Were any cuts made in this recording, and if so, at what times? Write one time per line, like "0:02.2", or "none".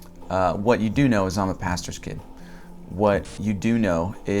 0:03.4